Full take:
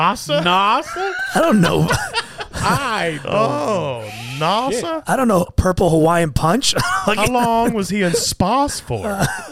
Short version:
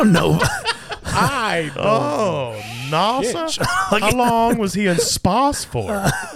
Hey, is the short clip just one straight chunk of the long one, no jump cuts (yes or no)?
no